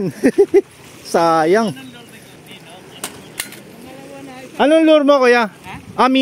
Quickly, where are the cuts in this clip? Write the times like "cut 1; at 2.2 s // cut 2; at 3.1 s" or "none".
cut 1; at 2.4 s